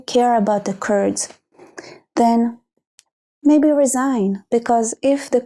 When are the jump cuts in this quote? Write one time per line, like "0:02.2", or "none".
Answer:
none